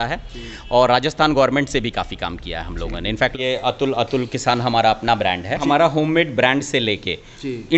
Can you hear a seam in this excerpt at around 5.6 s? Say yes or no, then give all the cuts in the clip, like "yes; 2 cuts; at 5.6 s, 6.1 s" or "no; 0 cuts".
yes; 2 cuts; at 3.3 s, 5.6 s